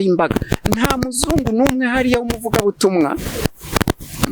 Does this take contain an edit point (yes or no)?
no